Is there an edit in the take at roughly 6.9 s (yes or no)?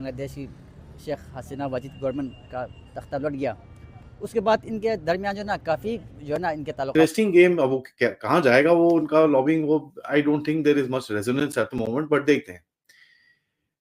yes